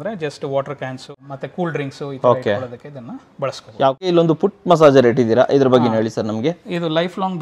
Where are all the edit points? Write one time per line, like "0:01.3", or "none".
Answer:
0:01.1
0:04.1